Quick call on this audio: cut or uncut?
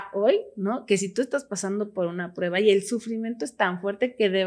uncut